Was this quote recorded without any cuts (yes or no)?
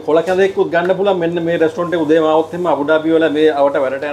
yes